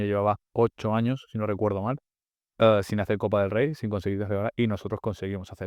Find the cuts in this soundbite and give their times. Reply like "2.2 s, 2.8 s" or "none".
none